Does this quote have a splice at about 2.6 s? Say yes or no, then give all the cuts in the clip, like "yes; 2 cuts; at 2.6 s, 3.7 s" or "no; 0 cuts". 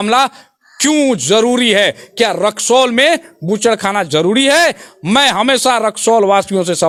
no; 0 cuts